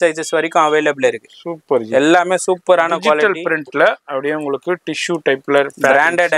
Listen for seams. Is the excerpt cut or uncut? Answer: uncut